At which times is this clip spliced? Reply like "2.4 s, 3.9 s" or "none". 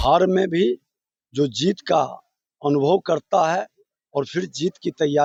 none